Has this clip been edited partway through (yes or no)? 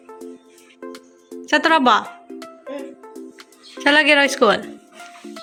no